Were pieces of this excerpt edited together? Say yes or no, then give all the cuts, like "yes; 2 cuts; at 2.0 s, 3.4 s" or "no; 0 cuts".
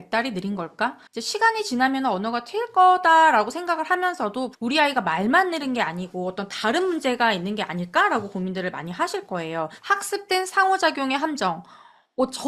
yes; 3 cuts; at 1.1 s, 4.5 s, 9.8 s